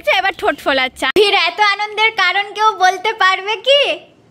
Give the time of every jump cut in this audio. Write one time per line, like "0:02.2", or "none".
0:01.0

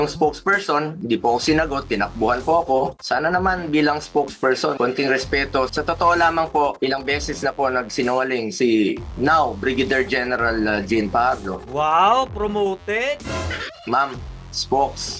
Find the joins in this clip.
0:04.8
0:05.7
0:13.7

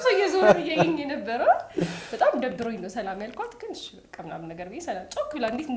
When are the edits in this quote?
none

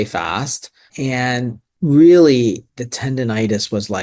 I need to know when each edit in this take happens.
0:01.6

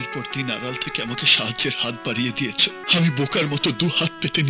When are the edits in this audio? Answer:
0:02.8

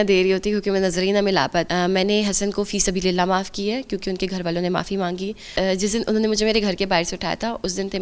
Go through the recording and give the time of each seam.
0:01.7
0:05.5

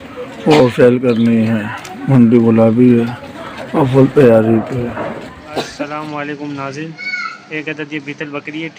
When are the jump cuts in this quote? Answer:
0:05.7

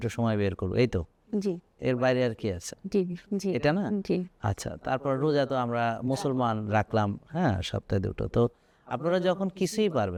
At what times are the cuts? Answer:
none

